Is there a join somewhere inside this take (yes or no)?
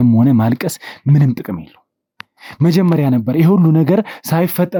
no